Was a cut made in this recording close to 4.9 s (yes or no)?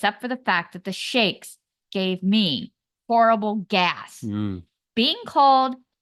no